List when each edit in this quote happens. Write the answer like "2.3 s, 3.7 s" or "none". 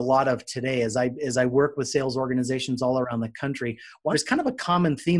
4.0 s

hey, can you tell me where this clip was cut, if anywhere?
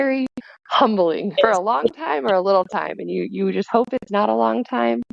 1.4 s

